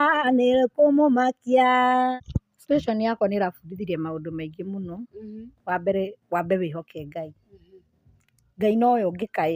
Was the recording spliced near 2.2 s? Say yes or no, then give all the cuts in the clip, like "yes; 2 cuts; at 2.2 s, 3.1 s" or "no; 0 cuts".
yes; 1 cut; at 2.2 s